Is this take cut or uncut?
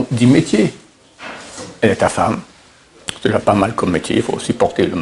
uncut